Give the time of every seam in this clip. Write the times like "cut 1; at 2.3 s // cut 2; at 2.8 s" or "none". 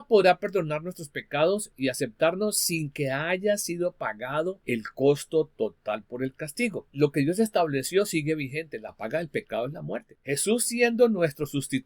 cut 1; at 1.7 s // cut 2; at 4.6 s // cut 3; at 6.8 s // cut 4; at 10.1 s